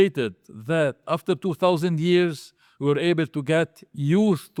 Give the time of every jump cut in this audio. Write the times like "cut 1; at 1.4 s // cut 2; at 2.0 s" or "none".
none